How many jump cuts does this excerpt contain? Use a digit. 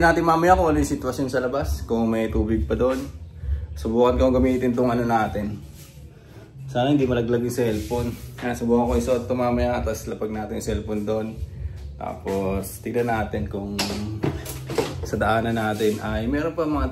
0